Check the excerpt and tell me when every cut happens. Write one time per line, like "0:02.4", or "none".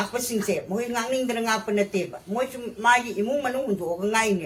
none